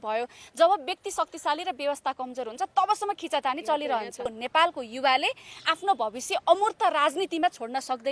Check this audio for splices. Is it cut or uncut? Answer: cut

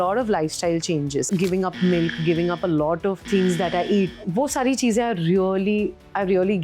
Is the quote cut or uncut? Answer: cut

